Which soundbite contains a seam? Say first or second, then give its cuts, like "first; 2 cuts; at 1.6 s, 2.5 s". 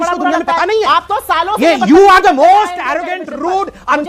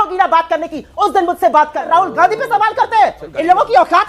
second; 1 cut; at 1.8 s